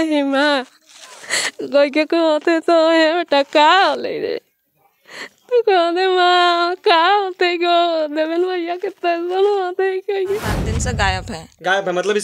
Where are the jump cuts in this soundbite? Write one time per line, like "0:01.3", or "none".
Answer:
0:10.7